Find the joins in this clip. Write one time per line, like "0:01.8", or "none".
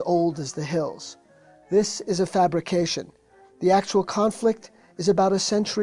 0:02.2